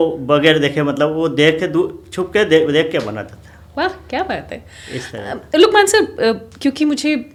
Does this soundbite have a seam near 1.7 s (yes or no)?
no